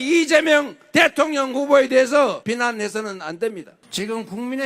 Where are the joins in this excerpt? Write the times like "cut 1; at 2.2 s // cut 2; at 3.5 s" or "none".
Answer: cut 1; at 2.4 s // cut 2; at 3.8 s